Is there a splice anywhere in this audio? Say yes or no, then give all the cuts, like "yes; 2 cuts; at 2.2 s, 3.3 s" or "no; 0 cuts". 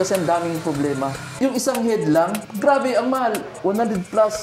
yes; 2 cuts; at 1.2 s, 2.5 s